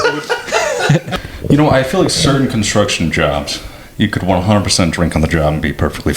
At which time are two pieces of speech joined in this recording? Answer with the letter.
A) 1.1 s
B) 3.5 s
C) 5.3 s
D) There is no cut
A